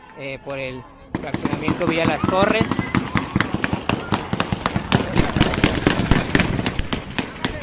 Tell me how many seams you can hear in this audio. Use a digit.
0